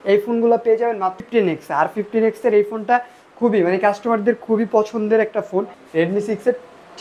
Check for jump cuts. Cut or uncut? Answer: cut